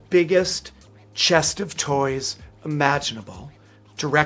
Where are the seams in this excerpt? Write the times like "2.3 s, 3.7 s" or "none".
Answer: none